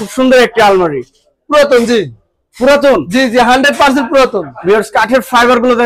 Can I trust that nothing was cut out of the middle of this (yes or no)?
yes